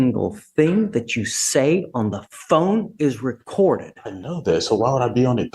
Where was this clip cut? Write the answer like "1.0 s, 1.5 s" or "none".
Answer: none